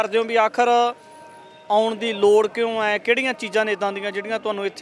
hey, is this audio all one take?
yes; 0 cuts

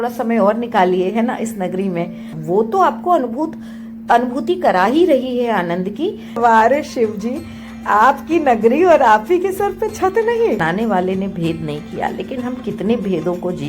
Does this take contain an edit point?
yes; 3 cuts; at 2.4 s, 6.4 s, 10.6 s

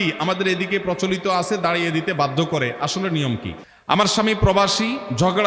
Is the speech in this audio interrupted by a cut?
yes; 1 cut; at 3.5 s

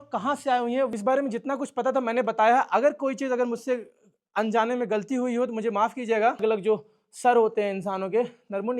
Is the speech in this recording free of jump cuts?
no; 2 cuts; at 0.9 s, 6.4 s

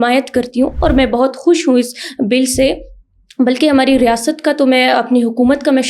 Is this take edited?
no; 0 cuts

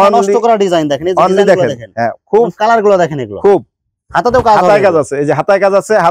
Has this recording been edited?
no; 0 cuts

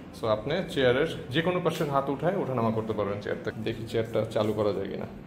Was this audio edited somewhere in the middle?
yes; 1 cut; at 3.5 s

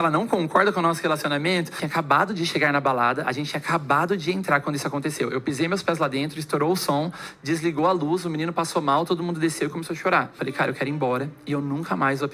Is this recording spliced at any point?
yes; 2 cuts; at 1.8 s, 10.4 s

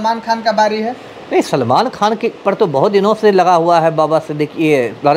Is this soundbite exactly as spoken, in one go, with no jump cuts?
yes; 0 cuts

